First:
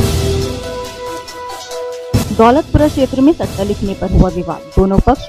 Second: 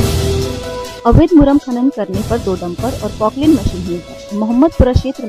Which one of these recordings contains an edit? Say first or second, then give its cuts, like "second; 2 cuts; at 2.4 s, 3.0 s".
first; 1 cut; at 0.9 s